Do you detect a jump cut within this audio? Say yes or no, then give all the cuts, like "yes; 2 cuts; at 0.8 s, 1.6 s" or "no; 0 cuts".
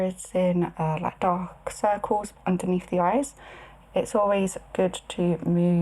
yes; 1 cut; at 2.3 s